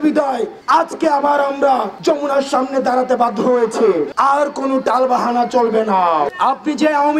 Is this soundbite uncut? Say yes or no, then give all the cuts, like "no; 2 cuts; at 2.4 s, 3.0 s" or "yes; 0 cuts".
no; 2 cuts; at 4.1 s, 6.3 s